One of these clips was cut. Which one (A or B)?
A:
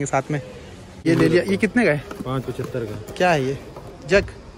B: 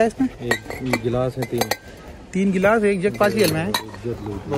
A